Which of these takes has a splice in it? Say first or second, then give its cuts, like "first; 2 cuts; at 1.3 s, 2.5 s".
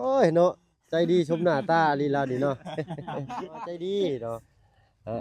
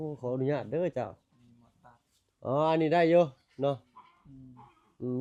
first; 1 cut; at 3.7 s